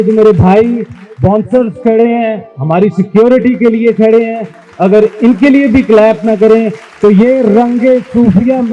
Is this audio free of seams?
yes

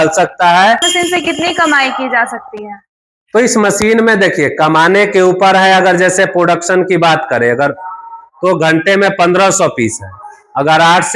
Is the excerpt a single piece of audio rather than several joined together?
yes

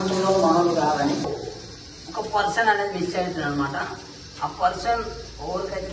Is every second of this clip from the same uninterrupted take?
no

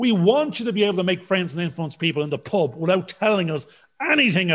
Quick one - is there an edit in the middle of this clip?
no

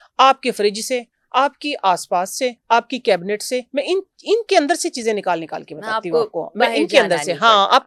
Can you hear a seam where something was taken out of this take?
no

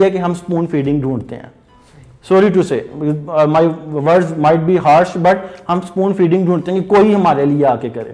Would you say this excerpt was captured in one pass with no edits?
yes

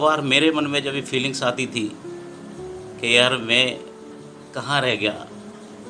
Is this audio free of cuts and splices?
yes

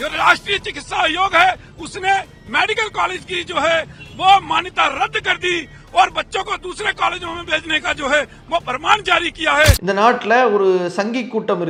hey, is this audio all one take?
yes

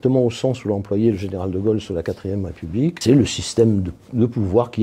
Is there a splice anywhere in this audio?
yes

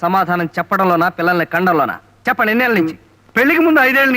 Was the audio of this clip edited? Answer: no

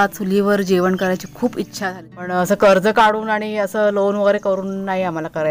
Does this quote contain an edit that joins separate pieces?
yes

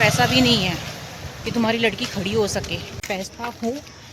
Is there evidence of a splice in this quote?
yes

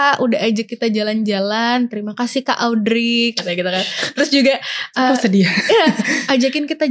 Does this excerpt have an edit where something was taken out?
no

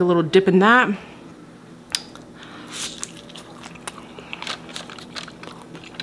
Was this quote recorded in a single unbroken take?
yes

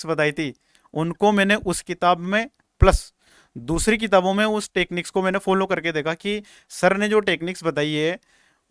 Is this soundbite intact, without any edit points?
yes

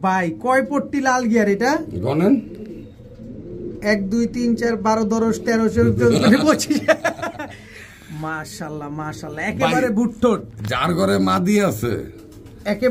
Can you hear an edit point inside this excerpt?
no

